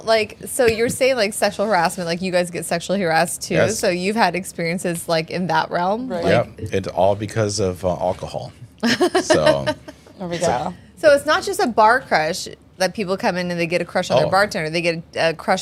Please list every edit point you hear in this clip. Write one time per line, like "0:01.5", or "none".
none